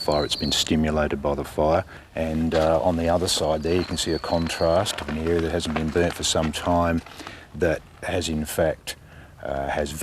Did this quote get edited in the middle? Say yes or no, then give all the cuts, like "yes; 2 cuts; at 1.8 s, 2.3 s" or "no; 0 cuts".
yes; 1 cut; at 2.0 s